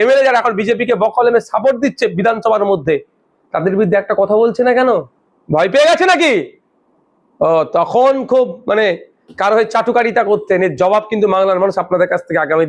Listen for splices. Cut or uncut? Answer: uncut